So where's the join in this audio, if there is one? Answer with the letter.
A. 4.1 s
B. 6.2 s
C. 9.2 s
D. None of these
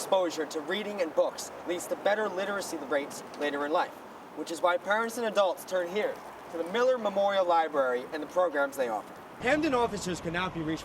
C